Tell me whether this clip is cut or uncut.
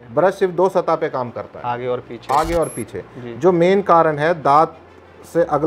uncut